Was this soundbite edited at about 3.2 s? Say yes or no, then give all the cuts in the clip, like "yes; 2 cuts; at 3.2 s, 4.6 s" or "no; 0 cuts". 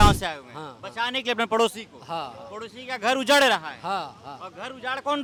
no; 0 cuts